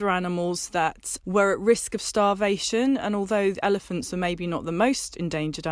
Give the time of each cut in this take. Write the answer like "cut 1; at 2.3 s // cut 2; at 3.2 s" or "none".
cut 1; at 1.1 s